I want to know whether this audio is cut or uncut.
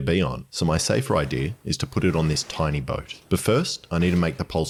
uncut